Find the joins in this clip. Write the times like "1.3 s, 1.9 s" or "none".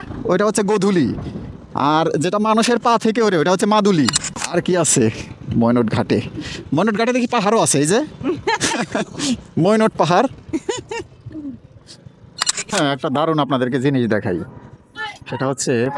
4.3 s, 12.7 s

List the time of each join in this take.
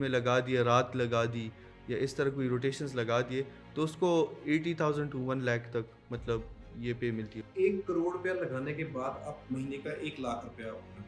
none

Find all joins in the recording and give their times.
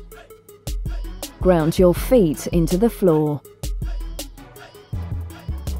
1.4 s, 3.4 s

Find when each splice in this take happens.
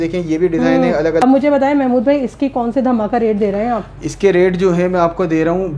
1.2 s

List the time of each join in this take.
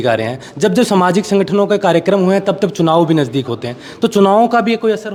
none

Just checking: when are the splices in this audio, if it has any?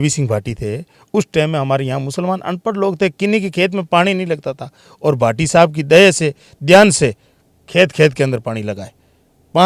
none

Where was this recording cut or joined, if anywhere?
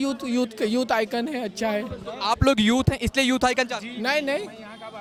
none

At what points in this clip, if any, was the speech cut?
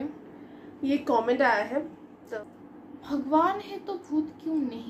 2.2 s

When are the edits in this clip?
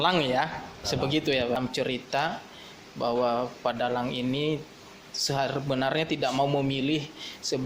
1.6 s

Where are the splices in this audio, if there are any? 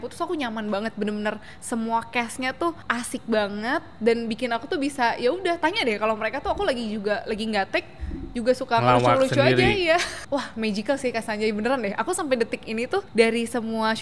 2.8 s, 10.1 s, 13.1 s

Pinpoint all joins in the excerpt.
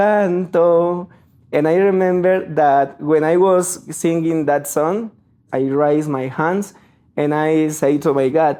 none

